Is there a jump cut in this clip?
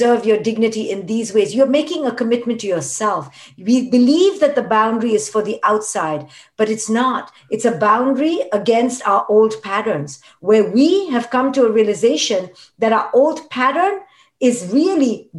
no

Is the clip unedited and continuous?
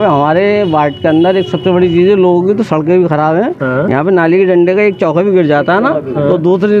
yes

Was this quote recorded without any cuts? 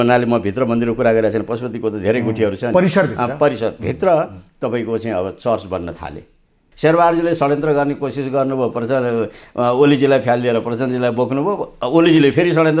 no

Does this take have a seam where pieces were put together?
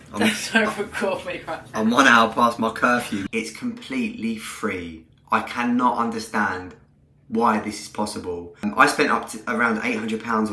yes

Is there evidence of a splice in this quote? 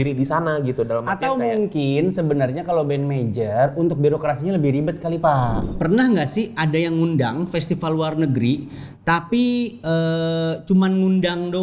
yes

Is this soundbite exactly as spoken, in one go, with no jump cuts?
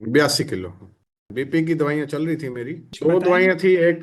no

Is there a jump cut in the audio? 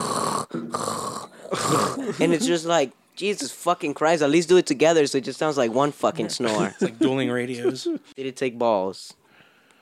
yes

